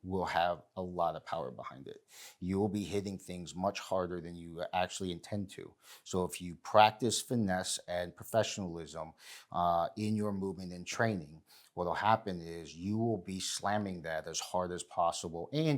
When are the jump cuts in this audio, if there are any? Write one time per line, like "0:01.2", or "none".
none